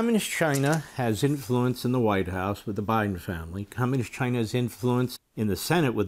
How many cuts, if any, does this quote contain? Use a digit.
1